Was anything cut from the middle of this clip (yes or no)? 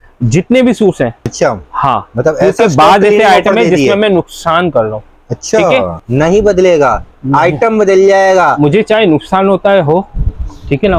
yes